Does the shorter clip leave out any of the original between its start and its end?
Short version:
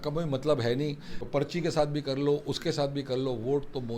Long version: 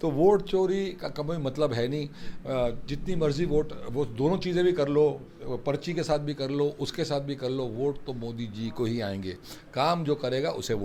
yes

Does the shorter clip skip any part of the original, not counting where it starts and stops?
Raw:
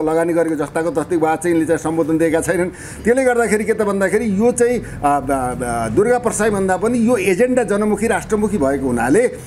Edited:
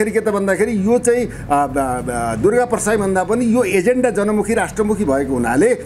no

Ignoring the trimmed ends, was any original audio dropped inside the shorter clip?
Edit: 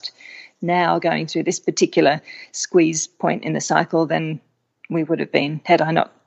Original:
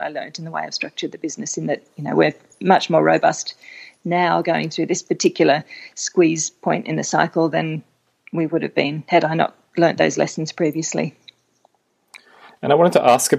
no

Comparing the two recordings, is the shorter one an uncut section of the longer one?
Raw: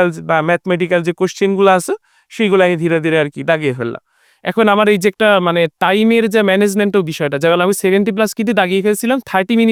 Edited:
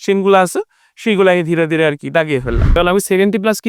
no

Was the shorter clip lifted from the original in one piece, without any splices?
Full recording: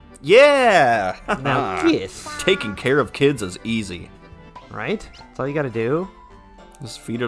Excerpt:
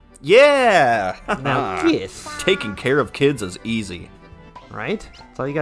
yes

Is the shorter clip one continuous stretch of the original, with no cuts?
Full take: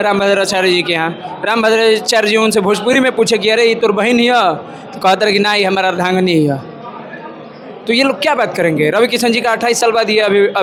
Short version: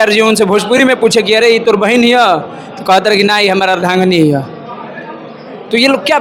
yes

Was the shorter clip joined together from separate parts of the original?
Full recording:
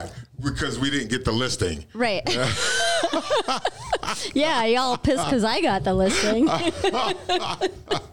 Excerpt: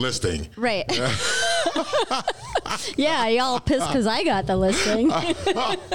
no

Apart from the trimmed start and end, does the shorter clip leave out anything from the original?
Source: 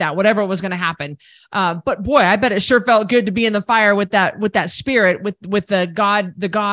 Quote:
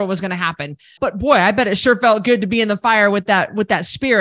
yes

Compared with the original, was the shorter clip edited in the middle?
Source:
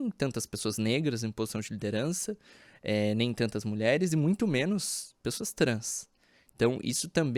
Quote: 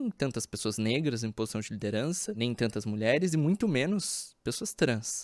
yes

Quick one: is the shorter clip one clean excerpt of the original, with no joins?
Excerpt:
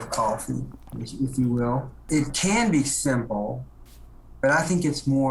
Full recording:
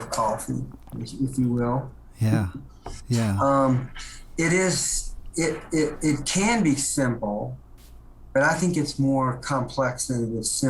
no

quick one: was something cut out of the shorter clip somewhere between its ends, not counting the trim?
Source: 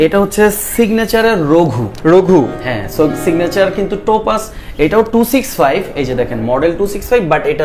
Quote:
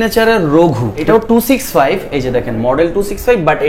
yes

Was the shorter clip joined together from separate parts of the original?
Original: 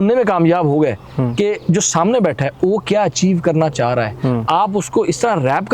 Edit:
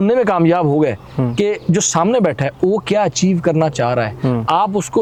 no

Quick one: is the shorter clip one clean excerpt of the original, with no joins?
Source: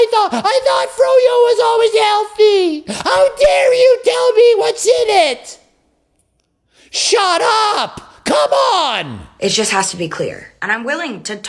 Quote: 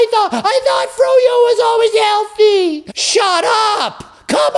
no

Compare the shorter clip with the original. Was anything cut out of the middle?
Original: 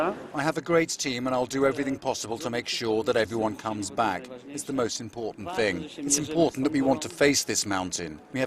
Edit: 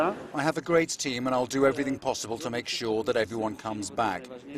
no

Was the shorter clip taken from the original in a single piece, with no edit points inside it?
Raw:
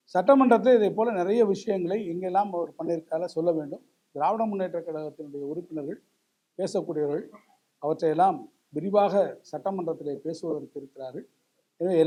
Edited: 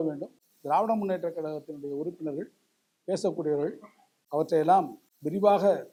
yes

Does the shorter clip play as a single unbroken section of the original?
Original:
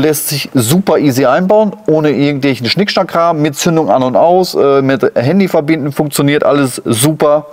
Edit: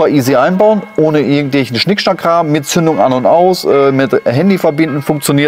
yes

